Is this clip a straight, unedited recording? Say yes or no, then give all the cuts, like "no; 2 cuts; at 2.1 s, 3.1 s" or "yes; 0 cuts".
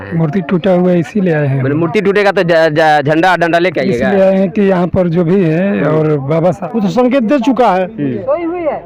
no; 1 cut; at 6.6 s